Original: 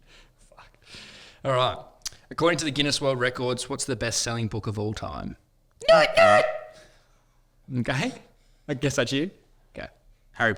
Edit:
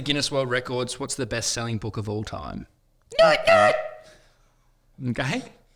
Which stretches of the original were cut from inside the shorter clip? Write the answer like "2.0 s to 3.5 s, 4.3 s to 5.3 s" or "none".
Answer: none